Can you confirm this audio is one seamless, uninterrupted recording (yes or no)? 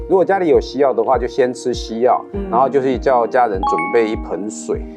yes